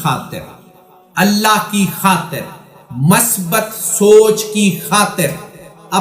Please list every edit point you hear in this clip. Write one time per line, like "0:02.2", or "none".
none